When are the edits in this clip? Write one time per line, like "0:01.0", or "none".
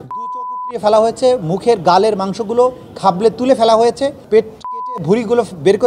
0:04.6